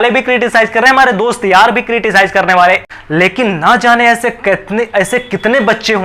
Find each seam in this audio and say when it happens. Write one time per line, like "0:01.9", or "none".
0:02.9